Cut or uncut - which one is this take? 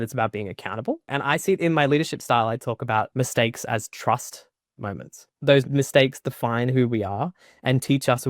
cut